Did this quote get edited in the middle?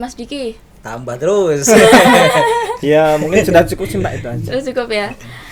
no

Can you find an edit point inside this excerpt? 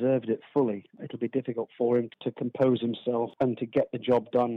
yes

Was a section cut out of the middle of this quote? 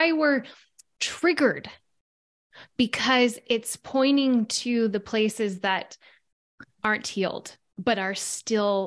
no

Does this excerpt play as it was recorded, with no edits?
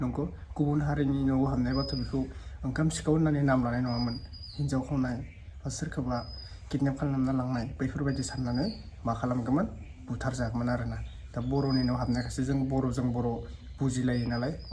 yes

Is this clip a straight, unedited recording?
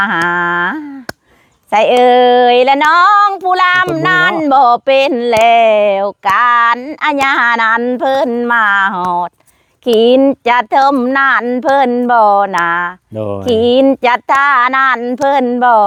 yes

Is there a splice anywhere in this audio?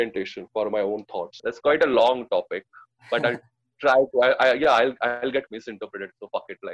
yes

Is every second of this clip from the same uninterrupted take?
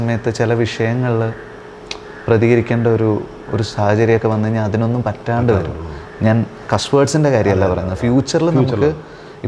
yes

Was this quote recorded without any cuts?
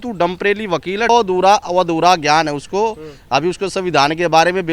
no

